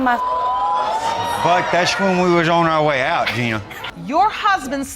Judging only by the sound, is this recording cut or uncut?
cut